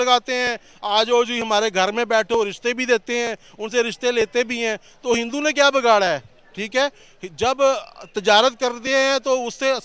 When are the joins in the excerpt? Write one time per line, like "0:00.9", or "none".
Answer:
none